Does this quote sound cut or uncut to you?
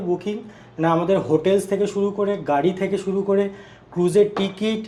uncut